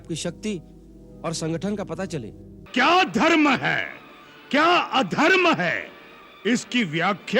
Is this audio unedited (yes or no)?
no